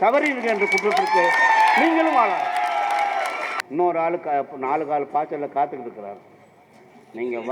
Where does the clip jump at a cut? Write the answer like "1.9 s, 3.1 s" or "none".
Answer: 3.5 s